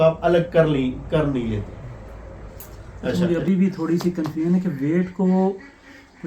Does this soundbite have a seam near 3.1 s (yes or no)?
yes